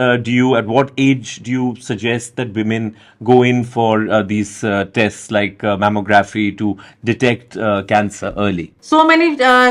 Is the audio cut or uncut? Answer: cut